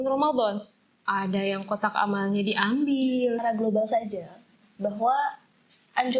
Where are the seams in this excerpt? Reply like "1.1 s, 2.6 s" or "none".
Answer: 3.4 s